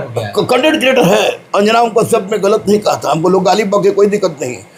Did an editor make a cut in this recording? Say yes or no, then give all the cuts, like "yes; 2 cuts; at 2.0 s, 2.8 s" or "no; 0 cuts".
no; 0 cuts